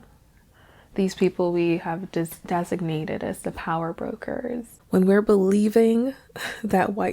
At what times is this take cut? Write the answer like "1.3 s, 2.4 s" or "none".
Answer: 4.7 s